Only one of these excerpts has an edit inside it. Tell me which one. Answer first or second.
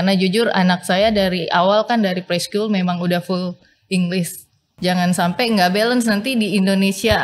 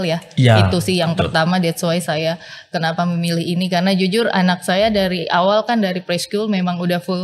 first